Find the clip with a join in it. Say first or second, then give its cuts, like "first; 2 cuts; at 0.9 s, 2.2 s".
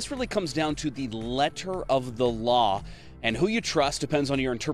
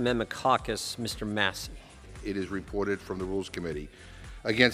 second; 1 cut; at 1.9 s